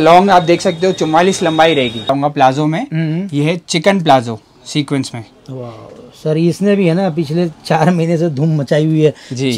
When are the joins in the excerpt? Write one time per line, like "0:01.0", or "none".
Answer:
0:02.1